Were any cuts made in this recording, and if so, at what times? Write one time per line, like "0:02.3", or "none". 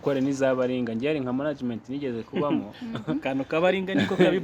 none